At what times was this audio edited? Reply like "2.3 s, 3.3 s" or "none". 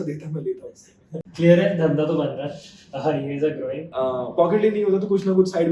1.2 s, 3.9 s